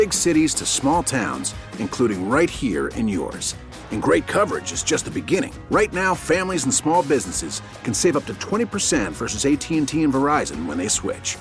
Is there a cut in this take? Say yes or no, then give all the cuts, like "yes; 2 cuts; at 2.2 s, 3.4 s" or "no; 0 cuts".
no; 0 cuts